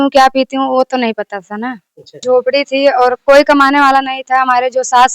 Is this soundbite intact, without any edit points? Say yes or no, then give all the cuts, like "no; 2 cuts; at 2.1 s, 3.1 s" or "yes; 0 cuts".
no; 1 cut; at 2.2 s